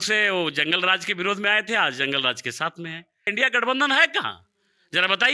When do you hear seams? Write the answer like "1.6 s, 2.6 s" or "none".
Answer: 3.3 s

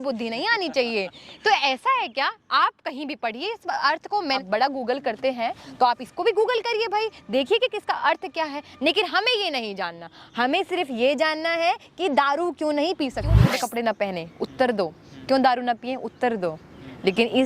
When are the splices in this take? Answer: 4.4 s, 13.5 s

